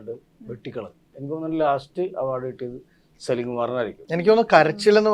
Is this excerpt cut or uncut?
cut